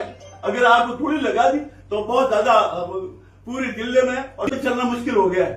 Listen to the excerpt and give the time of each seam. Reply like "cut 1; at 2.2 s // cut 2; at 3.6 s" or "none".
cut 1; at 4.6 s